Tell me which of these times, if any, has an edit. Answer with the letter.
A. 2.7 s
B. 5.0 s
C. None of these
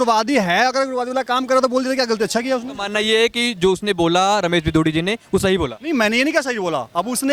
A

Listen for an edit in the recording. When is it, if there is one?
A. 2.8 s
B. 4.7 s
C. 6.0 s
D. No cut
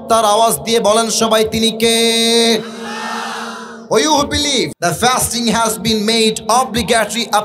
B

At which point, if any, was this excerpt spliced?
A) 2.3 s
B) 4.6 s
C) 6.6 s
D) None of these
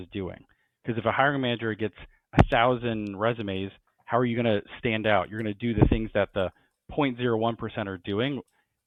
D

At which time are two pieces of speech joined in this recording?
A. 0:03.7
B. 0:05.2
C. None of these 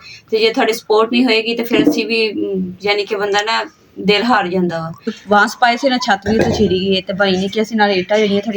B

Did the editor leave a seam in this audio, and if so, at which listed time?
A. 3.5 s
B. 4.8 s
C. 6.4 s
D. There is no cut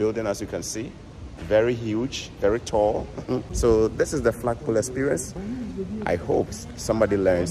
A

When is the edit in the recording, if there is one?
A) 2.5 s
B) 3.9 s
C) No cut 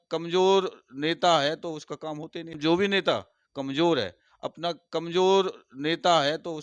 A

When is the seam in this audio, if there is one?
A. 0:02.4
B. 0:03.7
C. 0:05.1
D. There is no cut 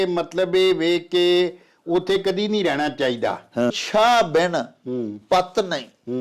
B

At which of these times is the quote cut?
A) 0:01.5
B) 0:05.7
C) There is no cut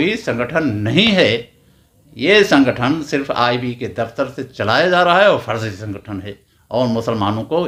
C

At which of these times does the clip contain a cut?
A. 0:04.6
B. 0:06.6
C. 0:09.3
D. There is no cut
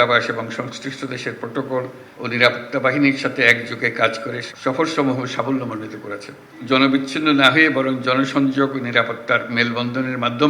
B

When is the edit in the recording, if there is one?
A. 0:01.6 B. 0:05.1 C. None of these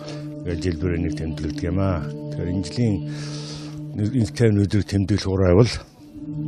B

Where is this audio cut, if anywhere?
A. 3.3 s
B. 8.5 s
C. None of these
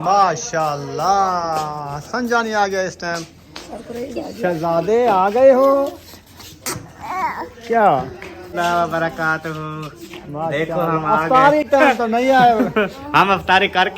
B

